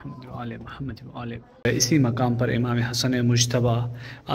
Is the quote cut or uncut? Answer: cut